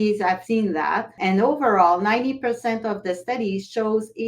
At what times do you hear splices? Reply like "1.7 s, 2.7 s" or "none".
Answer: 1.0 s